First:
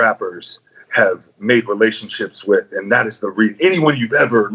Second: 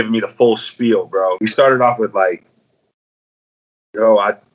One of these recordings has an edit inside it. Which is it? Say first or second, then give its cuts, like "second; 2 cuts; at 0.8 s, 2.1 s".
second; 1 cut; at 1.4 s